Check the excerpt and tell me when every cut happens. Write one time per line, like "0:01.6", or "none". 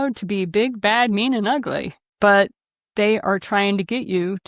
0:02.0